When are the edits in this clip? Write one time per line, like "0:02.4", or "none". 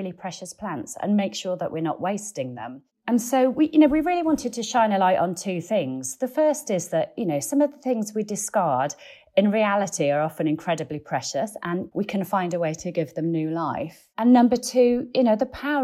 0:03.0
0:11.9